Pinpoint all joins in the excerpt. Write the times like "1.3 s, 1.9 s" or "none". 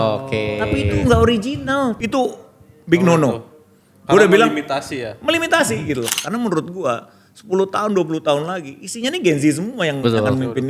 2.0 s, 6.1 s